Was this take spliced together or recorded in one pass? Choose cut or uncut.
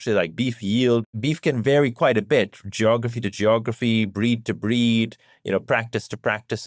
cut